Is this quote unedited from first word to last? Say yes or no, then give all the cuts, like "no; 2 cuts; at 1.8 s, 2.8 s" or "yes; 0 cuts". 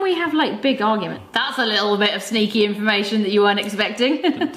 no; 1 cut; at 1.2 s